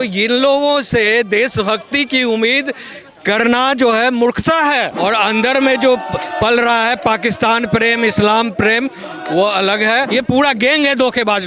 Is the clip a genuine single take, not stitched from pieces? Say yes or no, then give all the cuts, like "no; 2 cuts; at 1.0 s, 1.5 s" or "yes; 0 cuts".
no; 2 cuts; at 4.9 s, 10.1 s